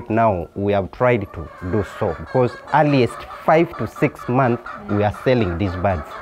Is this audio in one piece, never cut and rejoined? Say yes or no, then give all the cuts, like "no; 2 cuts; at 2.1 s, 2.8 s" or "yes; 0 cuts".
yes; 0 cuts